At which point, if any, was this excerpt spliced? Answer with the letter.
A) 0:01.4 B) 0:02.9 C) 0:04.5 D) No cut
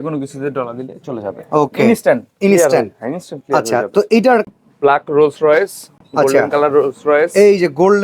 C